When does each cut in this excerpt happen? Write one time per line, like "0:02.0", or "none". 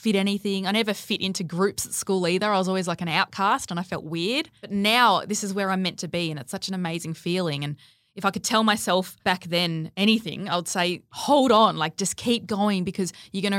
0:04.7
0:09.3
0:11.1